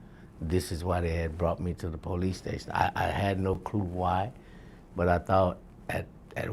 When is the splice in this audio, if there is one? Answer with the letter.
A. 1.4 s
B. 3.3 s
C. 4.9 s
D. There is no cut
D